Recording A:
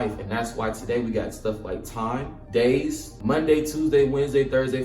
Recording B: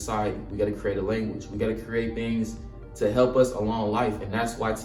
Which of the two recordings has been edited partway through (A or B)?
A